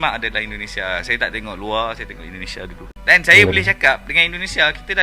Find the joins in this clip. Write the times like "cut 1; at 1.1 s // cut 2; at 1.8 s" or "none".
cut 1; at 2.8 s